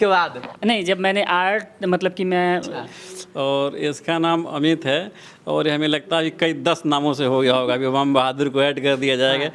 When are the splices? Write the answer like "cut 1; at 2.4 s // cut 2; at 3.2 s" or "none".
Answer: cut 1; at 2.8 s